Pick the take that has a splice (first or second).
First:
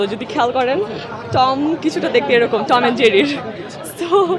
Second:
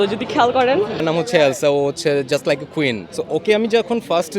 second